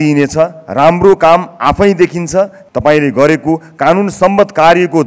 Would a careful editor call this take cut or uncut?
cut